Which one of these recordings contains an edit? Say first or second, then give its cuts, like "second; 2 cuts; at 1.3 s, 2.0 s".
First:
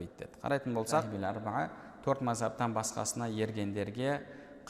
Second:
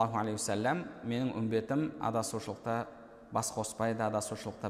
first; 1 cut; at 1.1 s